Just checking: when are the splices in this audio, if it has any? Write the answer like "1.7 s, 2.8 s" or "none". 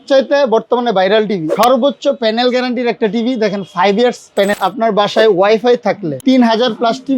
1.5 s, 4.5 s, 6.1 s